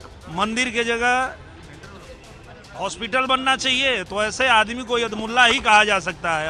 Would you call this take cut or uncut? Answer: uncut